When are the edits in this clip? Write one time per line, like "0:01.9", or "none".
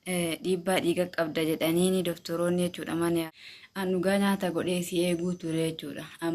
0:03.3